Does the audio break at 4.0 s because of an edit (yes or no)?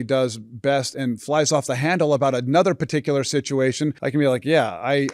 yes